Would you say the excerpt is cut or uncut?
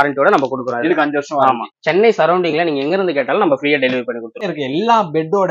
cut